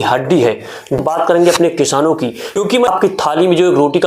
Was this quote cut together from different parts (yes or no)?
yes